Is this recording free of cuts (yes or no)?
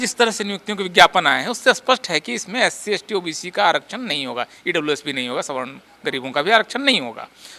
yes